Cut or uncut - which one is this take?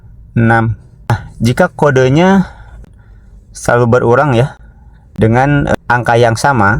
cut